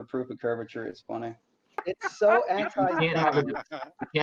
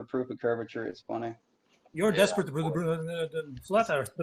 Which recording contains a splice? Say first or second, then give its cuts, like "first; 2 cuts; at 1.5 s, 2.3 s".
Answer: first; 1 cut; at 1.9 s